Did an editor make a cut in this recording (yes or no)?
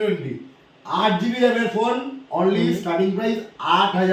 no